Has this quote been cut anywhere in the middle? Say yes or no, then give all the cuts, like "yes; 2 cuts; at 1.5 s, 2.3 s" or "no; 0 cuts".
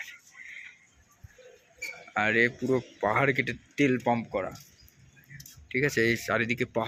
no; 0 cuts